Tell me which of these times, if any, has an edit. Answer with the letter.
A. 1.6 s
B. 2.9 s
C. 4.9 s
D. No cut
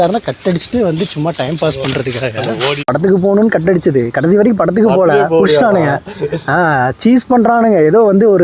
B